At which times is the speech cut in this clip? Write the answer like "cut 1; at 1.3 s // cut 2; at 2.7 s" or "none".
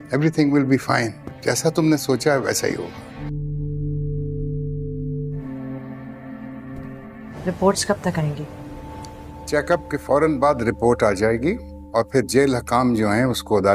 cut 1; at 3.2 s // cut 2; at 5.4 s // cut 3; at 7.3 s